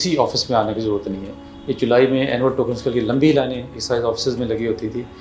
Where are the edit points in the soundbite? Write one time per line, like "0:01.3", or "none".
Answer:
none